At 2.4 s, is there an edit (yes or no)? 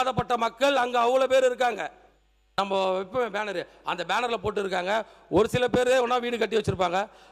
yes